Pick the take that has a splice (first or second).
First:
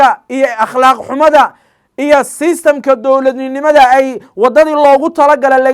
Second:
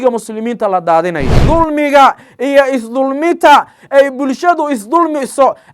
second